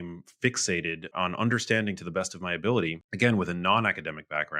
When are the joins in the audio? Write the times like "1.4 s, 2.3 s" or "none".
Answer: 1.1 s, 3.0 s